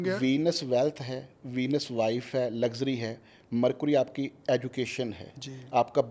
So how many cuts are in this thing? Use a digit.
0